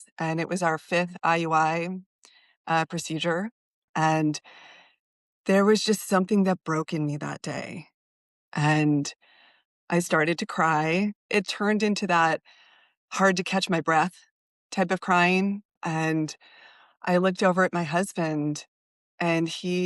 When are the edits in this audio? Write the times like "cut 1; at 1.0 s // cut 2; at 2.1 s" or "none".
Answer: cut 1; at 3.9 s // cut 2; at 8.2 s // cut 3; at 11.2 s // cut 4; at 15.8 s